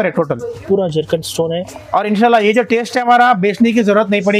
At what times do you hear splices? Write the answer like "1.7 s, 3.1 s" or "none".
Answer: none

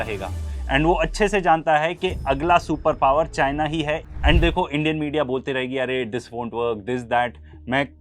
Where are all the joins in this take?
4.1 s

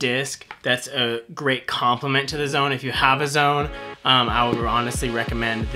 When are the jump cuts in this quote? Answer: none

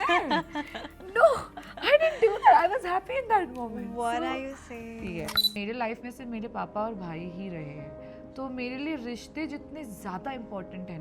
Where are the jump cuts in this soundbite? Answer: 5.6 s

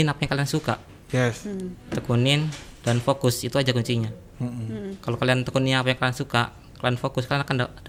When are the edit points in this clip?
none

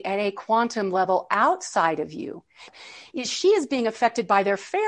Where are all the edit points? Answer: 2.8 s

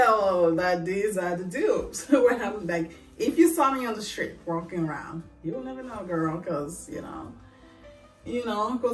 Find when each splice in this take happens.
none

